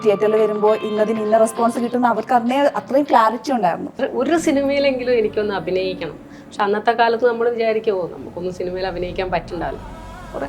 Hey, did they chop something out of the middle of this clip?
yes; 1 cut; at 3.9 s

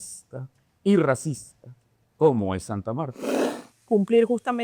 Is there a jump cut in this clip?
yes; 1 cut; at 3.7 s

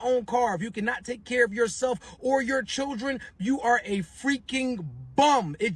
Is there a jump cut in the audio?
no; 0 cuts

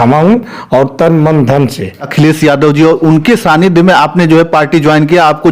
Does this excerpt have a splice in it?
yes; 1 cut; at 2.1 s

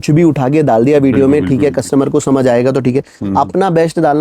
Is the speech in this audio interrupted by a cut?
no; 0 cuts

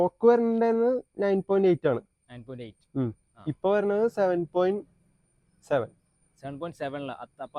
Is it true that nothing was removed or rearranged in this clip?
yes; 0 cuts

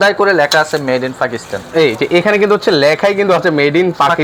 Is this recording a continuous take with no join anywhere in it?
yes; 0 cuts

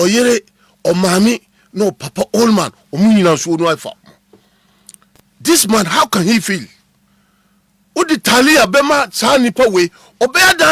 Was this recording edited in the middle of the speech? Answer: no; 0 cuts

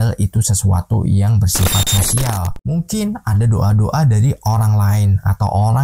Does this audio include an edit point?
yes; 1 cut; at 2.6 s

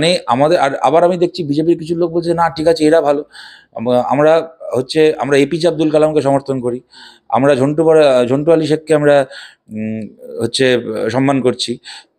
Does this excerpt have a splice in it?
no; 0 cuts

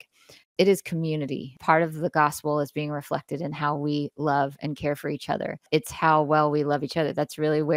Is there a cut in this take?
yes; 2 cuts; at 1.5 s, 5.7 s

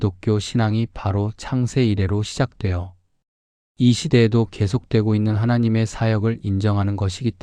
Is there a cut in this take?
no; 0 cuts

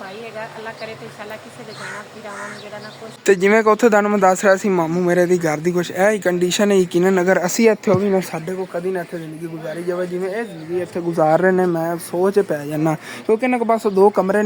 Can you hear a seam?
yes; 1 cut; at 3.2 s

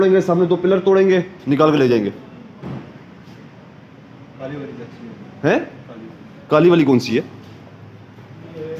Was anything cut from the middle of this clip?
yes; 1 cut; at 2.9 s

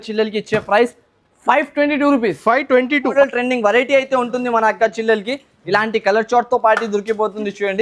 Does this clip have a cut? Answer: yes; 1 cut; at 3.1 s

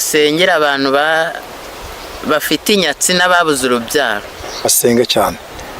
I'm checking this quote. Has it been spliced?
yes; 1 cut; at 4.7 s

